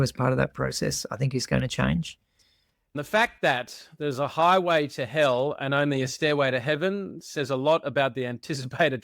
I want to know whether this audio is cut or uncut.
cut